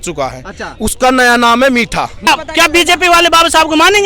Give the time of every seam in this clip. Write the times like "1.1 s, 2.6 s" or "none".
2.3 s